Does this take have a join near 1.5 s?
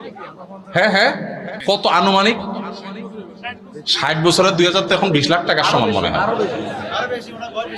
yes; 1 cut; at 1.5 s

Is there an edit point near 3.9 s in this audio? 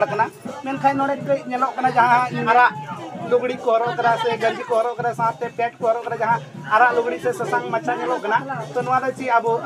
no; 1 cut; at 2.4 s

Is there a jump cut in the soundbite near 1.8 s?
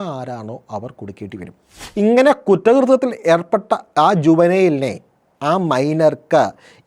yes; 1 cut; at 1.8 s

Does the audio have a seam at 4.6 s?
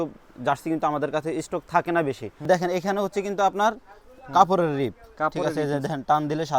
no; 1 cut; at 2.5 s

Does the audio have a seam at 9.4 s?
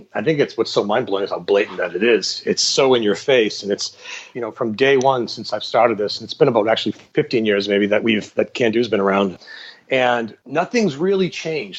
yes; 4 cuts; at 4.2 s, 7.0 s, 9.4 s, 10.4 s

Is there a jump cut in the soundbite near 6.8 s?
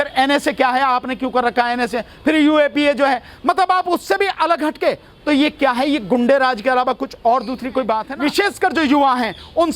no; 1 cut; at 8.1 s

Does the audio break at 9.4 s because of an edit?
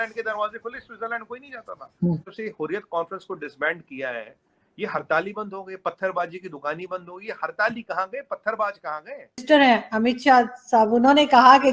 yes; 2 cuts; at 2.3 s, 9.4 s

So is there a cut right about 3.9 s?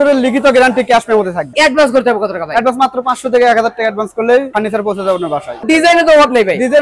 no; 2 cuts; at 1.5 s, 5.6 s

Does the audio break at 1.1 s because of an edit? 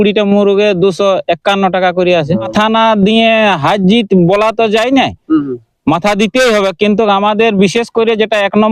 no; 1 cut; at 2.5 s

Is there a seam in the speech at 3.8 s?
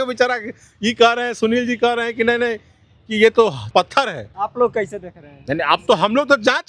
yes; 1 cut; at 3.8 s

